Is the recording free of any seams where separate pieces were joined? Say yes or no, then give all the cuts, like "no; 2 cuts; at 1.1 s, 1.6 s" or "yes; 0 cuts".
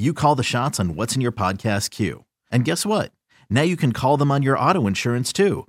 yes; 0 cuts